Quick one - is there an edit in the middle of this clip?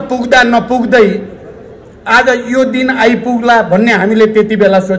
no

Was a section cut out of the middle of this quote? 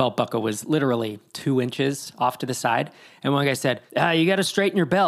yes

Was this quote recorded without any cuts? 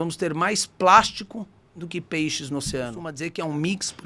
no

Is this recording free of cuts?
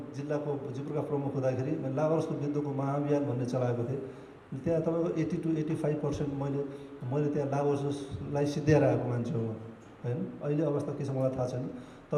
yes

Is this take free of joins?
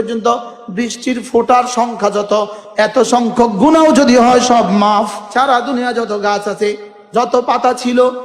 no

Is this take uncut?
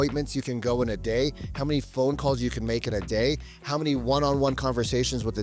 yes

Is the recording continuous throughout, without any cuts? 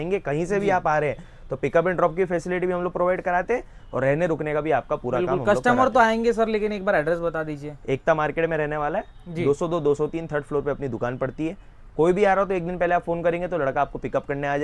yes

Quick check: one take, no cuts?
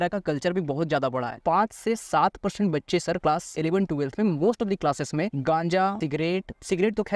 no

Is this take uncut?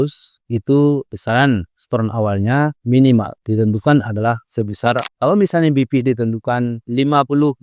no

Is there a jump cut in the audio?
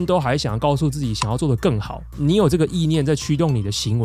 yes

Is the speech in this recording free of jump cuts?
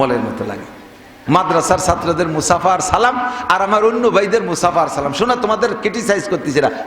no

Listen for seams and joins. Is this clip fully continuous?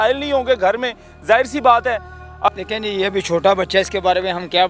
no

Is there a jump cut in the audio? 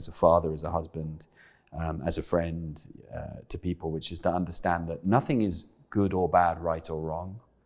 no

